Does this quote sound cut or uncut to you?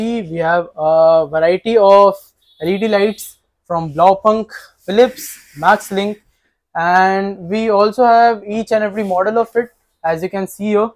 uncut